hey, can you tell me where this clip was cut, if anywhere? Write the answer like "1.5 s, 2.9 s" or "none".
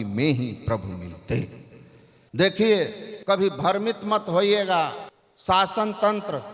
2.2 s